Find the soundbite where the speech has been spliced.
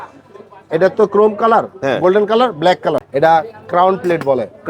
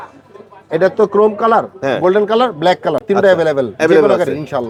first; 1 cut; at 3.0 s

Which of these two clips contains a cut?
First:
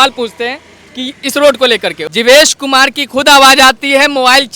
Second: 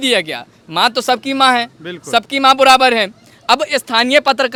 first; 1 cut; at 2.0 s

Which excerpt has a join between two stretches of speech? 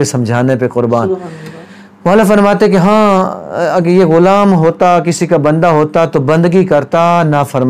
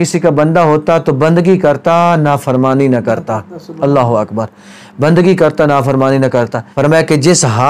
second; 1 cut; at 6.6 s

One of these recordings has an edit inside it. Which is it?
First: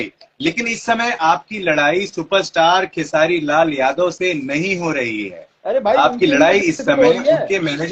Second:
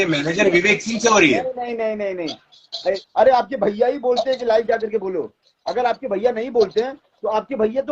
second; 1 cut; at 3.0 s

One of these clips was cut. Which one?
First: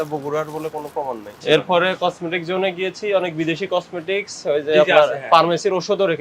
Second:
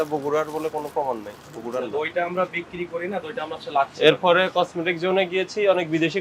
first; 1 cut; at 1.4 s

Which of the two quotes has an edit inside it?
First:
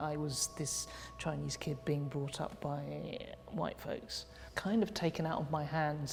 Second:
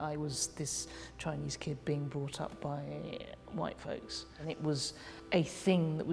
second; 1 cut; at 4.7 s

